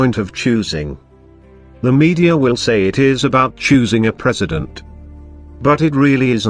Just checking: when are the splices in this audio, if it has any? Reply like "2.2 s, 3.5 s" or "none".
3.6 s